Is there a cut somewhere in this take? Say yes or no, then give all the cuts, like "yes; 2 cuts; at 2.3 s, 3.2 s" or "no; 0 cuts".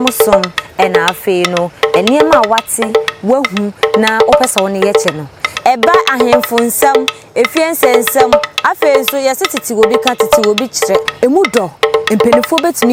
no; 0 cuts